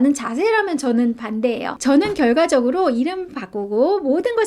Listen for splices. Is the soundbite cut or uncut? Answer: cut